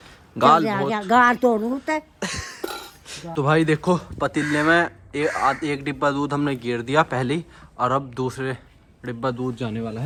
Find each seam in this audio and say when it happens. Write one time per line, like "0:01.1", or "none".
none